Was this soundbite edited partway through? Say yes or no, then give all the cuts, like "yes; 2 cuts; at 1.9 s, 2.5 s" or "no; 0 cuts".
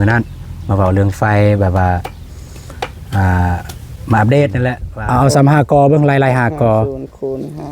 yes; 1 cut; at 4.9 s